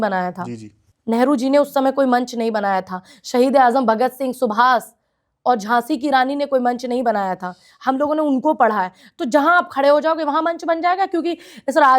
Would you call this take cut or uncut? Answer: uncut